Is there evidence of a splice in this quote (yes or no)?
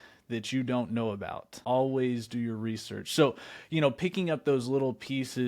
yes